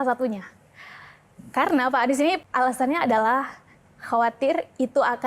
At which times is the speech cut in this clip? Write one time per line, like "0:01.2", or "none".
0:02.4